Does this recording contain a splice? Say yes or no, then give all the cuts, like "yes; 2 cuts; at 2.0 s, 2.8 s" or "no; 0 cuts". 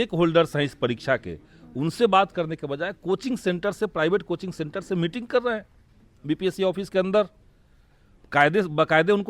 no; 0 cuts